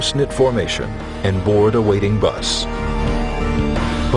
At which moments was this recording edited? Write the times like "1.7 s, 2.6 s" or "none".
none